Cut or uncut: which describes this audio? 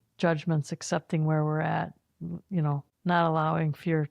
cut